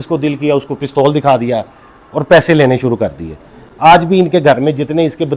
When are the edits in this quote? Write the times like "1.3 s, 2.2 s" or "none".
none